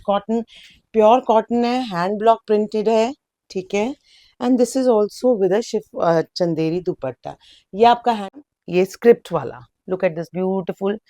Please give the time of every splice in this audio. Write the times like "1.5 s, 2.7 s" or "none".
8.4 s